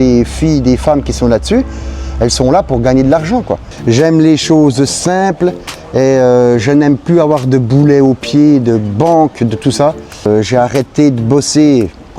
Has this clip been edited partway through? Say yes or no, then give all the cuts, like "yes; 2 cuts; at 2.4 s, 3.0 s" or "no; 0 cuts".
yes; 2 cuts; at 3.6 s, 10.3 s